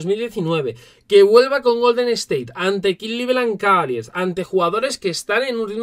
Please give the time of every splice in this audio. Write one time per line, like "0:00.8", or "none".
none